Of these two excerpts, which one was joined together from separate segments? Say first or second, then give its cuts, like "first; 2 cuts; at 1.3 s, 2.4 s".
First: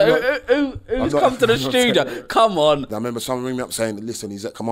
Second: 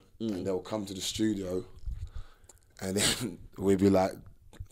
first; 1 cut; at 2.9 s